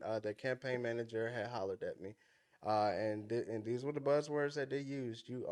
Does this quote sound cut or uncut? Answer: uncut